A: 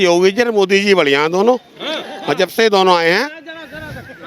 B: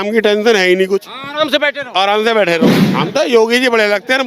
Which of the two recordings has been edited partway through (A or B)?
B